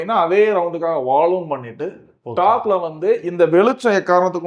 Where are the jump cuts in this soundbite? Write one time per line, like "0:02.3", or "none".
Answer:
none